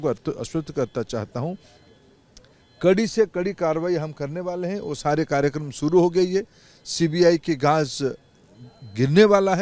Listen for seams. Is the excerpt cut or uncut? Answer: uncut